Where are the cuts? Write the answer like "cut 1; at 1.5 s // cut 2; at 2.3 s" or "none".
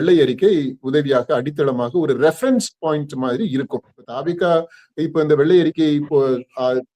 cut 1; at 4.0 s